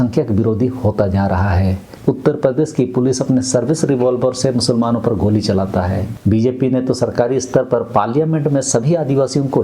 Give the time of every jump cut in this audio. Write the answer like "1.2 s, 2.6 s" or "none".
1.9 s, 6.1 s